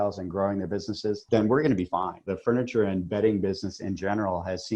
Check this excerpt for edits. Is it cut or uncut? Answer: cut